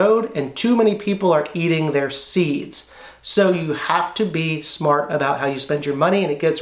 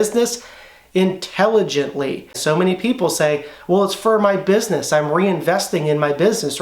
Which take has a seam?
second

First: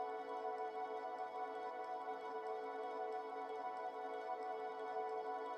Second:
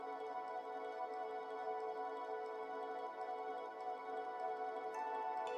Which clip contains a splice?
first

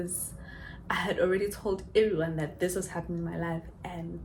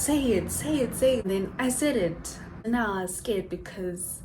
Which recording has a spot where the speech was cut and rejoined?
second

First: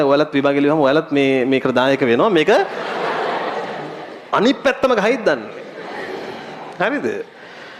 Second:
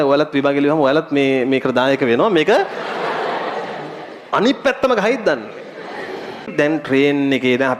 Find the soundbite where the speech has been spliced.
second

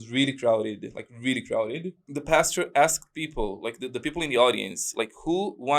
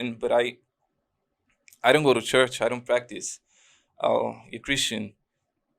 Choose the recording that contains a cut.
first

